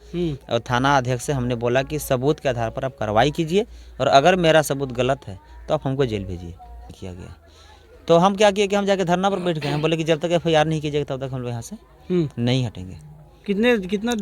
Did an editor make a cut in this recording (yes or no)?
yes